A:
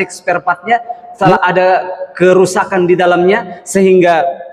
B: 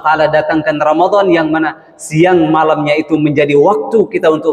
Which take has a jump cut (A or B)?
A